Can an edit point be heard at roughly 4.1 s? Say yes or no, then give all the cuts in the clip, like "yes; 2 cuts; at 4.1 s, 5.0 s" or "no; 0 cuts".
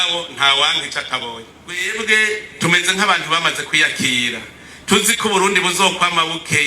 no; 1 cut; at 1.9 s